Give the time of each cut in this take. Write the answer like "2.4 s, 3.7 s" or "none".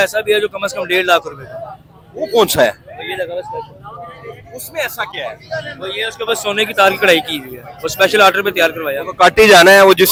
none